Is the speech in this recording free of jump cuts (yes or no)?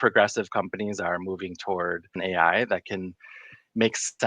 no